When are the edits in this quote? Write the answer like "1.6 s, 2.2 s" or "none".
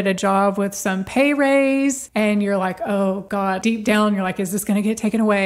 2.0 s, 3.4 s

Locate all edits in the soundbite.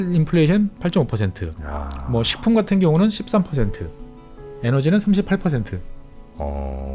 none

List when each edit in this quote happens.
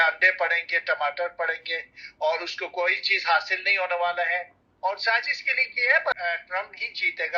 6.2 s

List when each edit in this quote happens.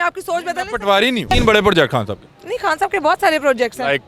1.3 s

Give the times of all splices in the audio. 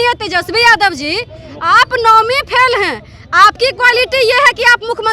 none

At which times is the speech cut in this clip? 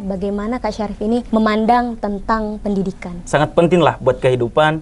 3.2 s

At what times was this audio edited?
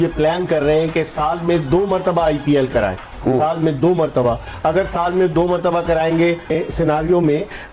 6.5 s

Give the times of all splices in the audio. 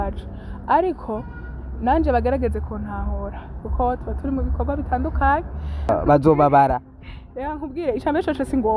5.9 s

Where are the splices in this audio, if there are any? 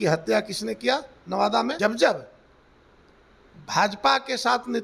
1.8 s

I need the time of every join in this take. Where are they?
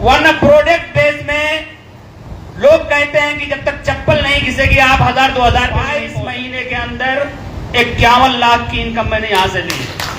6.1 s

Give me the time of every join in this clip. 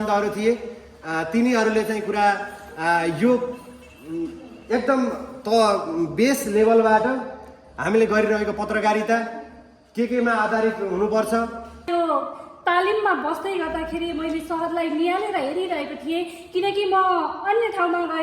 11.9 s

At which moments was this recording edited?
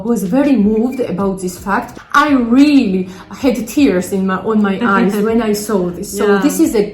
1.9 s

